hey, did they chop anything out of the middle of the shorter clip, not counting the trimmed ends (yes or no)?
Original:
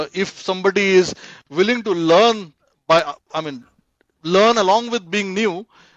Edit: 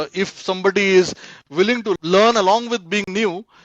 yes